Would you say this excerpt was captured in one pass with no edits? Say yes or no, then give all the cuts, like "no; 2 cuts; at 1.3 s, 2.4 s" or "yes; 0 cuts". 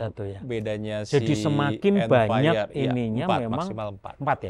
yes; 0 cuts